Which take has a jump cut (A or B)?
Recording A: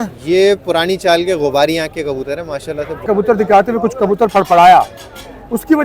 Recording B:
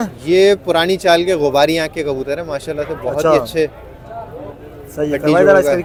A